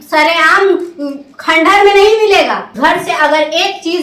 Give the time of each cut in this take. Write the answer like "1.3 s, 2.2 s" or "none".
2.7 s